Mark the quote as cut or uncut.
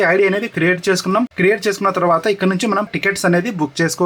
cut